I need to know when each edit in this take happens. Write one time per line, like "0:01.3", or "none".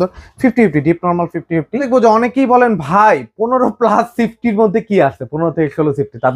0:01.8